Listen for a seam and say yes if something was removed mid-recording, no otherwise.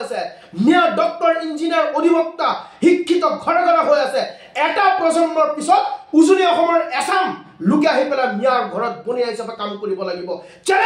no